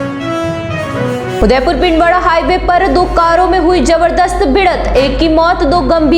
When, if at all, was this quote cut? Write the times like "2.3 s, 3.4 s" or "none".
none